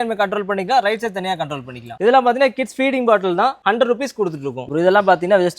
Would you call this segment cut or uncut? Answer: cut